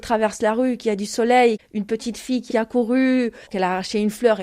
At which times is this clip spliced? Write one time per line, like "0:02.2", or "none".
0:01.6
0:03.4

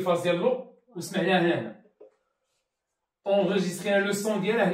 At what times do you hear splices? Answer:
none

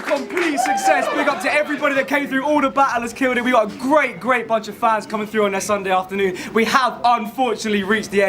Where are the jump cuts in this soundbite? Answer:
0:04.4

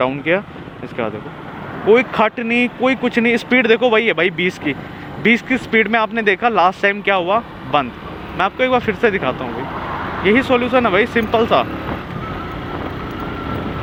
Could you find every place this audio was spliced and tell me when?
none

